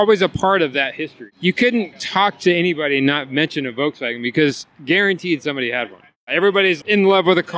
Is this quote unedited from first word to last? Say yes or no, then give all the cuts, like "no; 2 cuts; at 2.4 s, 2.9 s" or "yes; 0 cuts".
no; 3 cuts; at 1.2 s, 2.0 s, 6.6 s